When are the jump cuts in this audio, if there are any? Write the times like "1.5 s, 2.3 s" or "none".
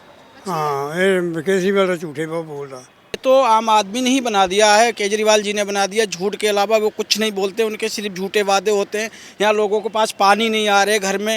3.2 s

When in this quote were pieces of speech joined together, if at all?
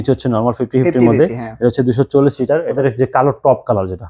2.8 s

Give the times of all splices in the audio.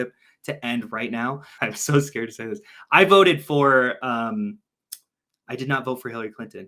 1.5 s

